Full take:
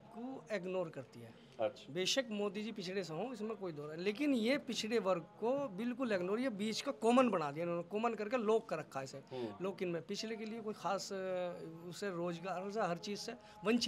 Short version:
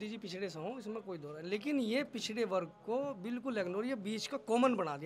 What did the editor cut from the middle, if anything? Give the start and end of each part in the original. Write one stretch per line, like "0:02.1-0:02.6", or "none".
none